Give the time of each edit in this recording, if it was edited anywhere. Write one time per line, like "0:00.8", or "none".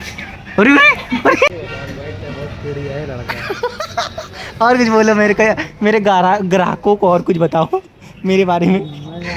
0:01.5